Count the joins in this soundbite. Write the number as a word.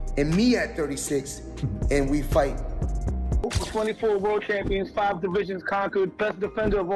one